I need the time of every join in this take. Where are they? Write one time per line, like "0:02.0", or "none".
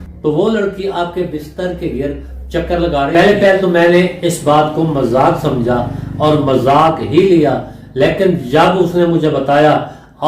0:03.1